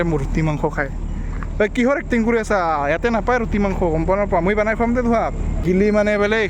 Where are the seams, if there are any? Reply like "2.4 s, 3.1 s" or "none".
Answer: 5.6 s